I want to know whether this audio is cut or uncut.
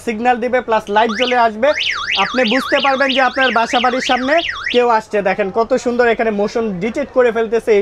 uncut